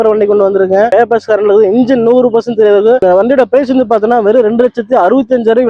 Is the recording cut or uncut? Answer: cut